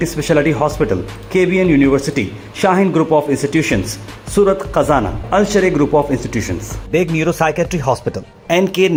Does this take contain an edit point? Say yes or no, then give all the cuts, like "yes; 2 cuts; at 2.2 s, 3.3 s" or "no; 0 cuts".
no; 0 cuts